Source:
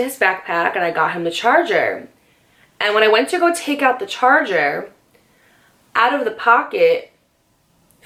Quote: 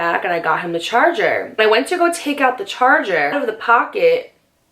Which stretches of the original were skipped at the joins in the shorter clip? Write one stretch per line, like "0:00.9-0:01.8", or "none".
0:02.1-0:03.0
0:04.7-0:06.1

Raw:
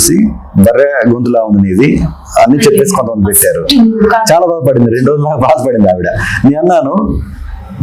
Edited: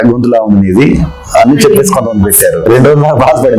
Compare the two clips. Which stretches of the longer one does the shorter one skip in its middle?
0:03.7-0:04.9

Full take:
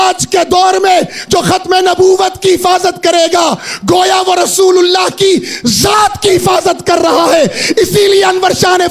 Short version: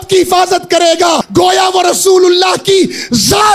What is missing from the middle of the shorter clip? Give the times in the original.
0:03.6-0:03.8

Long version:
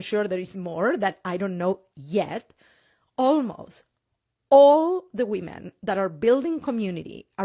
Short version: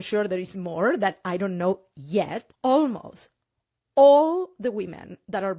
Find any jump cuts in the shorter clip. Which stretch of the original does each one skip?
0:02.4-0:03.0

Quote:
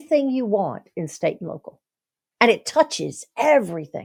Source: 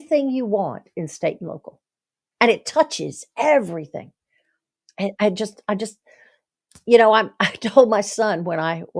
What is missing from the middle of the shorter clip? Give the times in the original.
none

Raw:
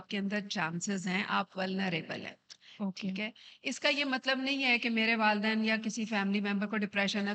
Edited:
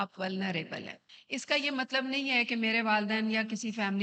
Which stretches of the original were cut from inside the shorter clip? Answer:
0:02.5-0:03.5

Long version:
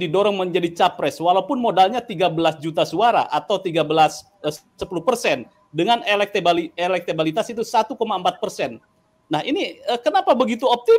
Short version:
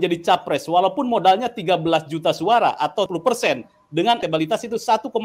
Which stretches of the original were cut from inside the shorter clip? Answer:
0:03.6-0:04.9
0:06.0-0:07.1

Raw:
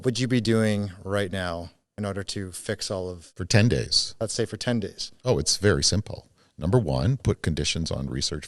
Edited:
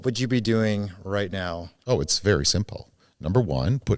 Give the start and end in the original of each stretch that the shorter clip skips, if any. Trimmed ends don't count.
0:01.7-0:05.1

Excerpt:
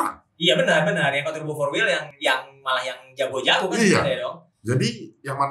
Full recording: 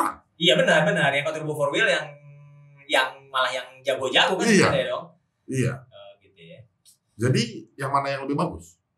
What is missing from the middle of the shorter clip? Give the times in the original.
0:02.1-0:02.8
0:05.2-0:07.0

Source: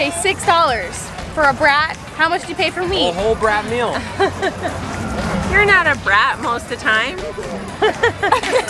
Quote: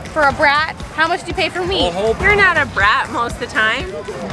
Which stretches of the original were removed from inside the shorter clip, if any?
0:03.4-0:05.5

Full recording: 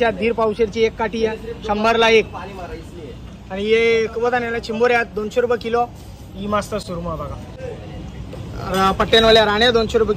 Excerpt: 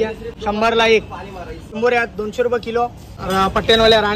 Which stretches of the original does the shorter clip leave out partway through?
0:02.9-0:04.6
0:06.1-0:08.5

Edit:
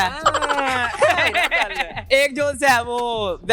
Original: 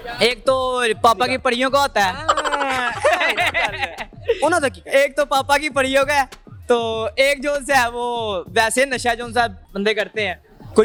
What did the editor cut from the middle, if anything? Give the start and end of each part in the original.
0:04.1-0:07.1

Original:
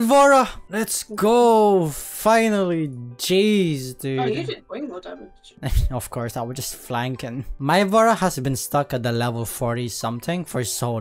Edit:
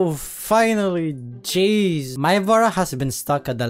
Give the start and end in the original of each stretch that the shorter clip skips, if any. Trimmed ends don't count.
0:03.8-0:07.5

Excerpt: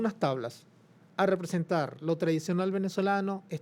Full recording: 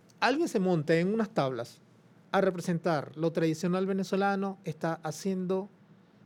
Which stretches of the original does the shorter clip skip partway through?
none

